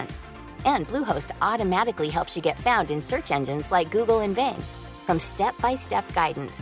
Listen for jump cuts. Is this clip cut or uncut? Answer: uncut